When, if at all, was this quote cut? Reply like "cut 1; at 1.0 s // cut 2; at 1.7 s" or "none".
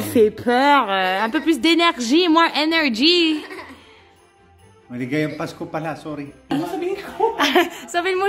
cut 1; at 6.5 s

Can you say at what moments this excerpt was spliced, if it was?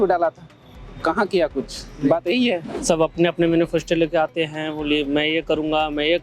cut 1; at 2.7 s

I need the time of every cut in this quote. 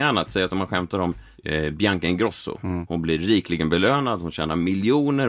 cut 1; at 1.3 s // cut 2; at 2.8 s

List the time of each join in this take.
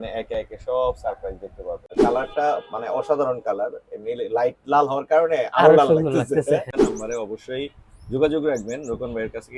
cut 1; at 1.9 s // cut 2; at 6.7 s

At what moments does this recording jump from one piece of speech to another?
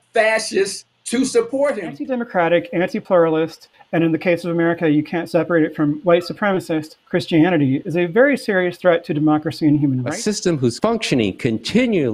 cut 1; at 1.9 s // cut 2; at 10.1 s

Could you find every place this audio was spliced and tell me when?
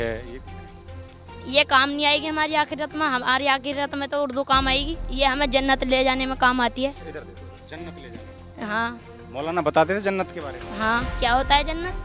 cut 1; at 5.0 s // cut 2; at 11.1 s

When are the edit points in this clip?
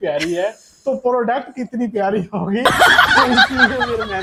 none

